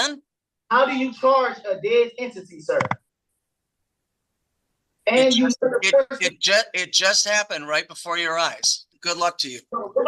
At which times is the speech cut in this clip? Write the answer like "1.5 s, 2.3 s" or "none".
8.9 s